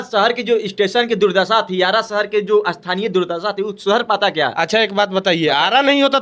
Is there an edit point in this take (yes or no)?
no